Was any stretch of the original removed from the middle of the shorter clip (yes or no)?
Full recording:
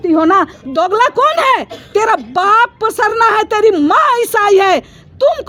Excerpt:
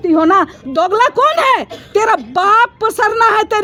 no